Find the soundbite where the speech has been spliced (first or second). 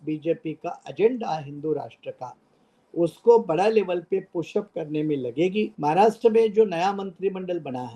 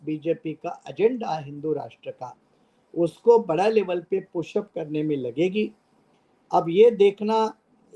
first